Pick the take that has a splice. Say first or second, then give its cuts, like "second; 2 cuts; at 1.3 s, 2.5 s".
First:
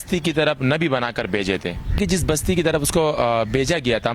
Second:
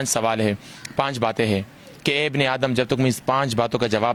first; 1 cut; at 2.0 s